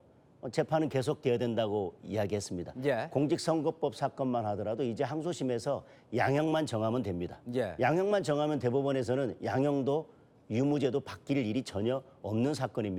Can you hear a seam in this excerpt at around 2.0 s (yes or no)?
no